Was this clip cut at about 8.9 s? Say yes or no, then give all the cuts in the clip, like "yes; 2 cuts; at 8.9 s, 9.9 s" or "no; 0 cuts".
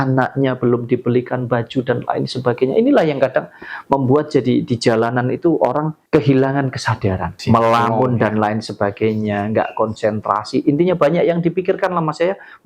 no; 2 cuts; at 6.0 s, 7.3 s